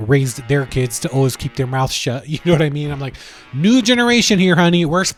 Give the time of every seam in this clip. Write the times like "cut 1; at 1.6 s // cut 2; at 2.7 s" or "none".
none